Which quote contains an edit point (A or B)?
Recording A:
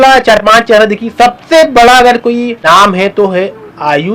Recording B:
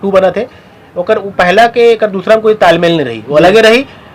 A